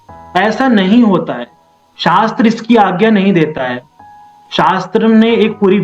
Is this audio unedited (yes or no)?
yes